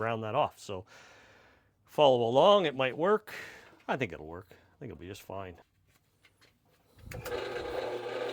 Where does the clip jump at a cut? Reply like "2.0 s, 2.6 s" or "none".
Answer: 5.6 s